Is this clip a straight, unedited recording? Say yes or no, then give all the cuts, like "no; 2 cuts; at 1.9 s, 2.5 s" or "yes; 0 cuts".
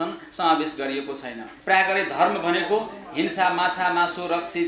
no; 1 cut; at 1.5 s